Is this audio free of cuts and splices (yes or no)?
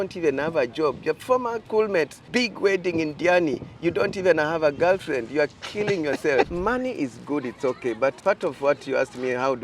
no